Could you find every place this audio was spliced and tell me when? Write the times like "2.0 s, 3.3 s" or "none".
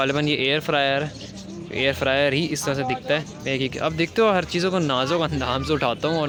none